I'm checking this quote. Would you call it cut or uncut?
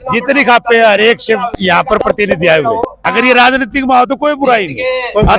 cut